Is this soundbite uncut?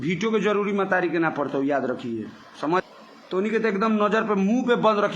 no; 1 cut; at 2.8 s

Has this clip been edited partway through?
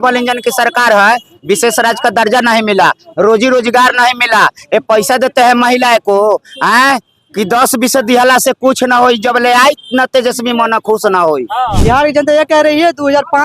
yes; 1 cut; at 11.8 s

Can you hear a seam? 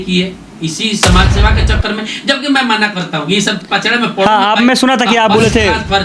no; 0 cuts

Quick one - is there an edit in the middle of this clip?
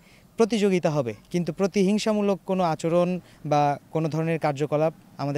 no; 0 cuts

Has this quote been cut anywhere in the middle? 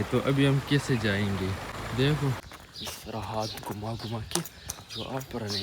yes; 2 cuts; at 1.7 s, 2.4 s

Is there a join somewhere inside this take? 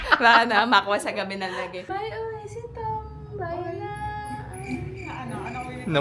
yes; 1 cut; at 1.8 s

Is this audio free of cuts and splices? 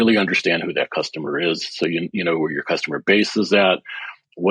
yes; 0 cuts

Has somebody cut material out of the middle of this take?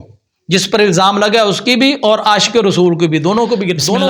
no; 0 cuts

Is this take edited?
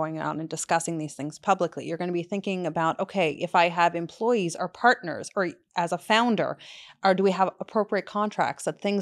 no; 0 cuts

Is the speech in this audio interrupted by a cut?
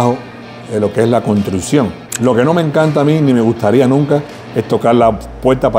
yes; 1 cut; at 2.1 s

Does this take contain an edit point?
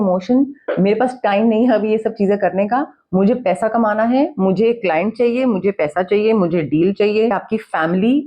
yes; 1 cut; at 7.3 s

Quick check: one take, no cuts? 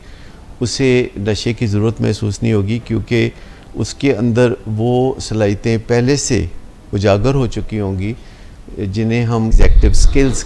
no; 1 cut; at 9.5 s

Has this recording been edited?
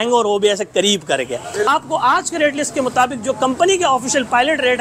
yes; 1 cut; at 1.7 s

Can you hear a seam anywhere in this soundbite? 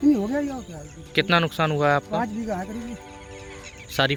no; 0 cuts

